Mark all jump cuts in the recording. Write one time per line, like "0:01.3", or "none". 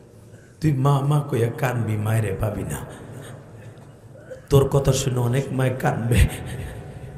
none